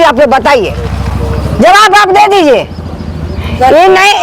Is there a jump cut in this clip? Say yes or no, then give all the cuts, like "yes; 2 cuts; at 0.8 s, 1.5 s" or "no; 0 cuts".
no; 0 cuts